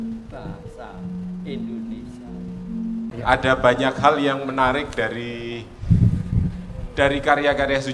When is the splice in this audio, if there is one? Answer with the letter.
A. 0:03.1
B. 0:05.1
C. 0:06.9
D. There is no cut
A